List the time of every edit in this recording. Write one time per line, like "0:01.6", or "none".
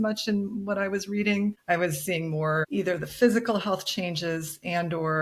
0:01.6
0:02.7